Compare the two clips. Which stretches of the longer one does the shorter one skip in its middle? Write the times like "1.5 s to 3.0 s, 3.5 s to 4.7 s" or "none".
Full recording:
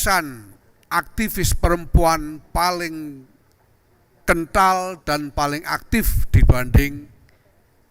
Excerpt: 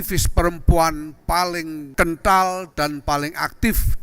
3.1 s to 4.1 s

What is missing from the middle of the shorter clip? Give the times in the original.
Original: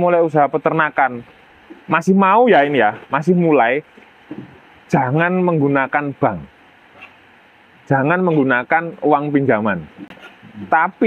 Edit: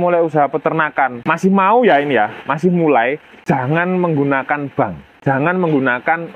1.2 s to 1.9 s, 3.9 s to 4.7 s, 6.5 s to 7.7 s

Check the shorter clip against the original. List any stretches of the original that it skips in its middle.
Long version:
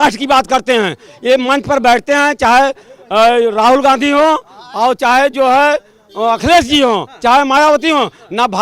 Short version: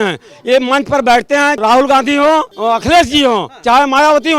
2.4 s to 3.5 s, 4.5 s to 6.1 s

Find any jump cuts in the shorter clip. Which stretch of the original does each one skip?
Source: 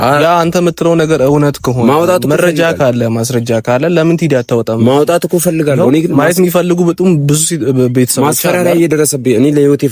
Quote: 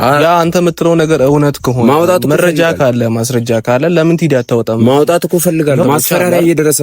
5.8 s to 8.2 s

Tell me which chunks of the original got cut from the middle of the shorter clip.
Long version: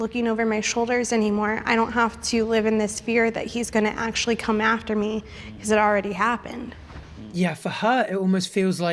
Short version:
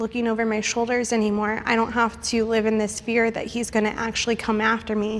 none

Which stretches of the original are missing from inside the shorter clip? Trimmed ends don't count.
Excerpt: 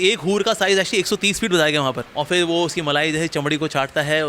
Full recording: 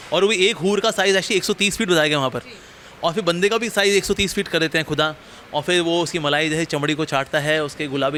2.4 s to 5.4 s

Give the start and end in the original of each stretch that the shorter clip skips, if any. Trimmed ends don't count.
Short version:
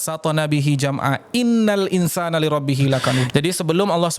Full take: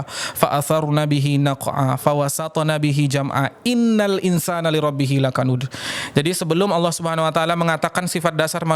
5.6 s to 6.1 s

